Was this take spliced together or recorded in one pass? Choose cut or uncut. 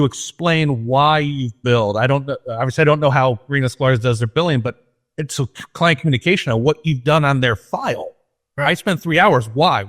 uncut